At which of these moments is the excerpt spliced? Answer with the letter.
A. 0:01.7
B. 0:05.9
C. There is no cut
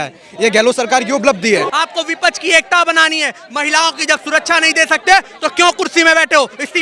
A